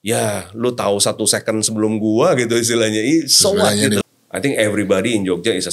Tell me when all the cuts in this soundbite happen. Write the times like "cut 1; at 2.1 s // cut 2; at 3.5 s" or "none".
cut 1; at 4.1 s